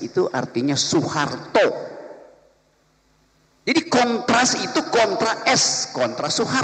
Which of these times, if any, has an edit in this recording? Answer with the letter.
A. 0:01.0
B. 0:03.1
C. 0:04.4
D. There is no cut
D